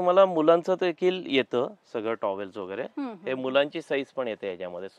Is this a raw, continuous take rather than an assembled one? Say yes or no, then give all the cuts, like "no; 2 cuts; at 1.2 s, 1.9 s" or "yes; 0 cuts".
yes; 0 cuts